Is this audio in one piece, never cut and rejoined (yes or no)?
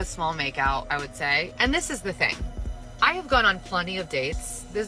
no